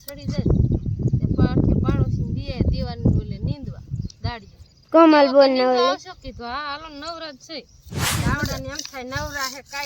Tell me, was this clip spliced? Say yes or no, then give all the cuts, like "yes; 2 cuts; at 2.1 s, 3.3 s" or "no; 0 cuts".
yes; 1 cut; at 8.2 s